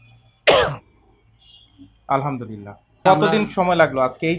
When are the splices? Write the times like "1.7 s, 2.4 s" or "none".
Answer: 3.0 s